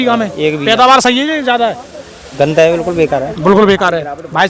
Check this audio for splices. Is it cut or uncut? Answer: uncut